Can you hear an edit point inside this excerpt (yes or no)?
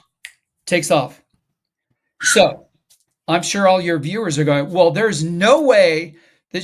no